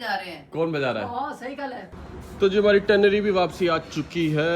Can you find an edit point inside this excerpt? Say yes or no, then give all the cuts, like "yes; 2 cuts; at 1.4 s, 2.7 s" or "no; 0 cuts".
yes; 1 cut; at 1.9 s